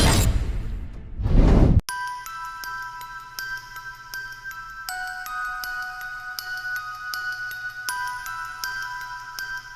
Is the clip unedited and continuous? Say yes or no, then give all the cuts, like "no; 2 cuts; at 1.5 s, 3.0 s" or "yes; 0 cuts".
yes; 0 cuts